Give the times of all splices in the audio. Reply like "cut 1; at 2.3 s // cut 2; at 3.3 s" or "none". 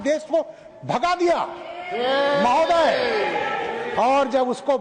none